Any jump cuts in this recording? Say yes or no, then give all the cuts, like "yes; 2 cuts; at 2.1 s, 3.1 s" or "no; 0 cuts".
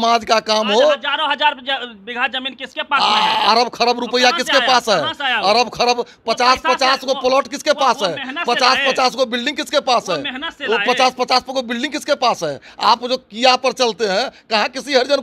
no; 0 cuts